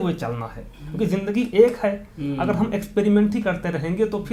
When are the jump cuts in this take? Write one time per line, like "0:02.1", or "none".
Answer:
none